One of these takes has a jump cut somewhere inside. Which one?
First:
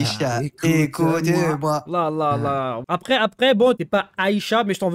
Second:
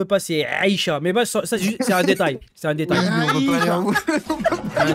first; 2 cuts; at 2.8 s, 3.8 s

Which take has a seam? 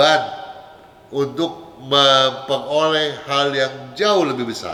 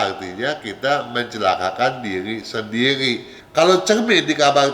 second; 1 cut; at 3.4 s

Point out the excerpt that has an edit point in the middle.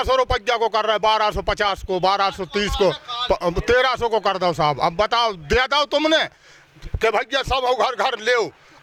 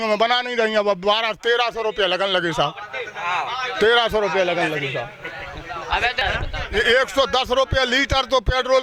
second; 1 cut; at 6.2 s

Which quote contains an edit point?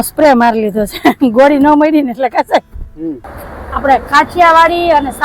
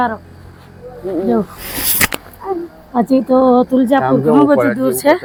first; 1 cut; at 3.2 s

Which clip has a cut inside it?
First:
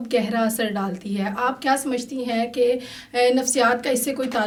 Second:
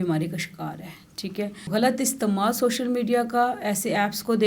second; 1 cut; at 1.7 s

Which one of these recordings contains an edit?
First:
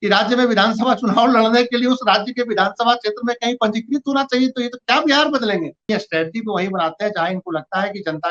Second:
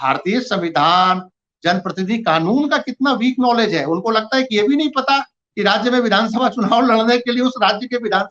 first; 1 cut; at 5.8 s

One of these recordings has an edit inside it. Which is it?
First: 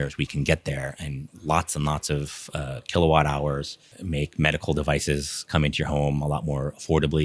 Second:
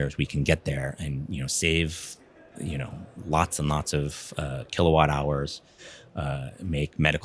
first; 2 cuts; at 1.2 s, 3.9 s

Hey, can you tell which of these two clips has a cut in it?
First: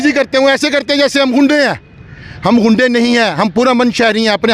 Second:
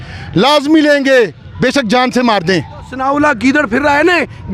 second; 1 cut; at 2.8 s

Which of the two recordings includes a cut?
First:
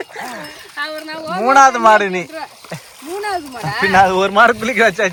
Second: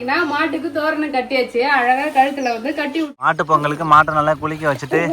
second; 1 cut; at 3.1 s

